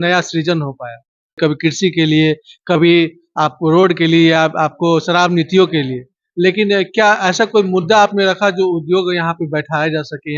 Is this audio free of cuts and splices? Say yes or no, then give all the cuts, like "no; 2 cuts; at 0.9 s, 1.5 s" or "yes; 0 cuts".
no; 1 cut; at 1.4 s